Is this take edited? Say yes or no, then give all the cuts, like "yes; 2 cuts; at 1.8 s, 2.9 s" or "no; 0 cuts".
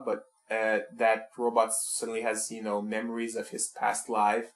yes; 1 cut; at 2.5 s